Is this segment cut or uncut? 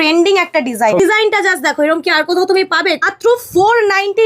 cut